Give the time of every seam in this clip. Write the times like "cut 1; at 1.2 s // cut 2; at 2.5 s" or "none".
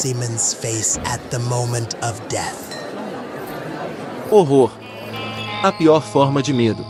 none